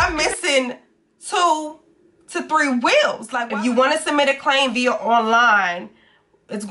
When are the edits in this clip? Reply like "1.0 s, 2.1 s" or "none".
3.3 s